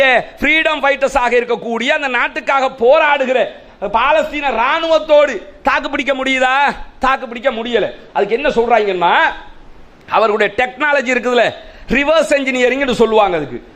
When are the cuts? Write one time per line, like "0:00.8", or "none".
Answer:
none

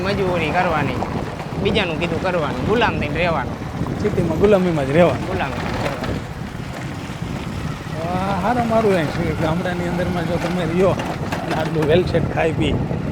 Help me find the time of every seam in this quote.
none

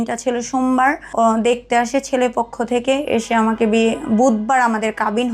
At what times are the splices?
0:01.0

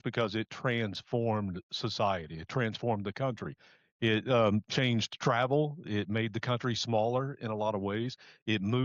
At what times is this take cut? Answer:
none

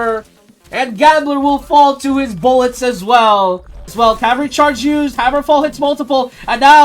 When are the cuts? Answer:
0:03.9

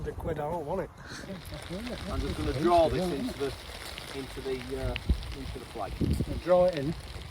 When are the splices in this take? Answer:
0:01.4

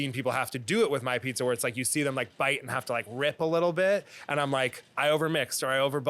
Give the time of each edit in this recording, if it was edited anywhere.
0:04.8

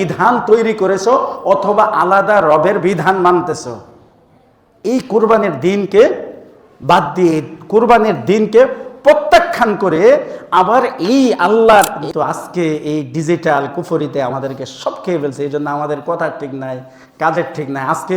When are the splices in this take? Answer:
0:12.0

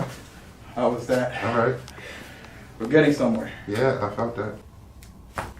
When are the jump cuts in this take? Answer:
0:04.6

